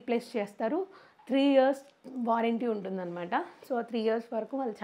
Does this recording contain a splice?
no; 0 cuts

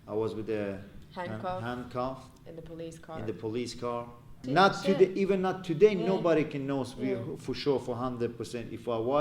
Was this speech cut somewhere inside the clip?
yes; 1 cut; at 4.4 s

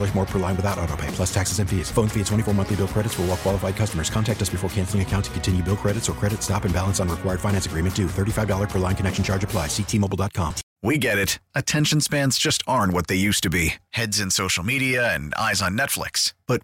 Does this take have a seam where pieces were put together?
yes; 1 cut; at 10.7 s

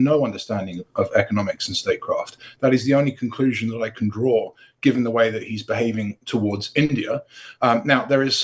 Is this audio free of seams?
yes; 0 cuts

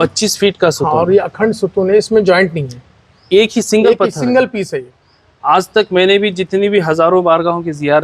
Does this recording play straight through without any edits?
no; 1 cut; at 5.4 s

